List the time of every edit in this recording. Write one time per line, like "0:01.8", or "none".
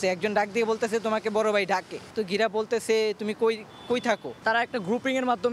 none